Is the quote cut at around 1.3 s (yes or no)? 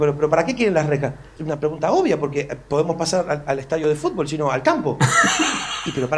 yes